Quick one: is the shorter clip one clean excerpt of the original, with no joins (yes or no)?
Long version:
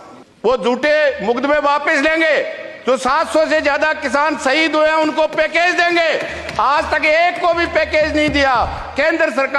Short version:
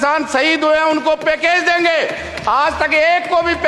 yes